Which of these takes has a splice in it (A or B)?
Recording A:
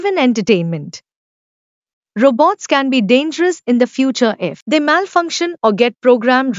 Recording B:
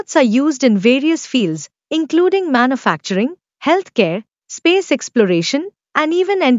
A